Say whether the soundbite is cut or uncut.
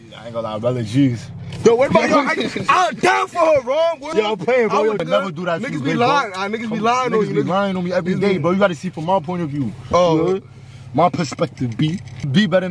uncut